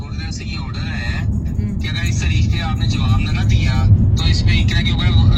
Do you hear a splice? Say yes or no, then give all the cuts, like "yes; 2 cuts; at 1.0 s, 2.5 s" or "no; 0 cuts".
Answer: no; 0 cuts